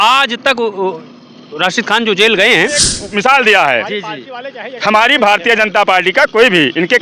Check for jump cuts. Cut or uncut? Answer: cut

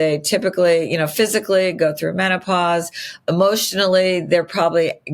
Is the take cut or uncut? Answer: cut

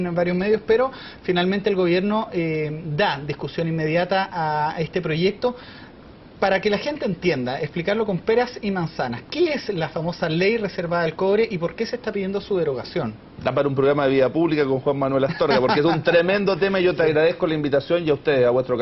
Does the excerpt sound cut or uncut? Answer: uncut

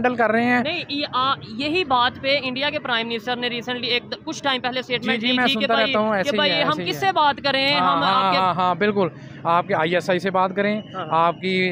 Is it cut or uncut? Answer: uncut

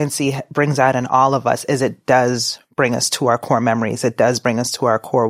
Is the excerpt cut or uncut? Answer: uncut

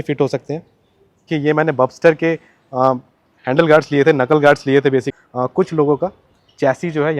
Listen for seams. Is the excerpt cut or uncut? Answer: cut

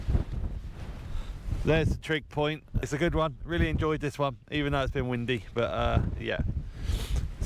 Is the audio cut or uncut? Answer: cut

